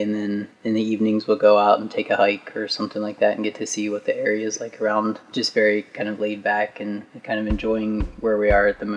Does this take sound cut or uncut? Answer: cut